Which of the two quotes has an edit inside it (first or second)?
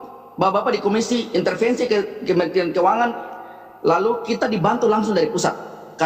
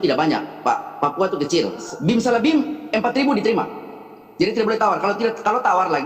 second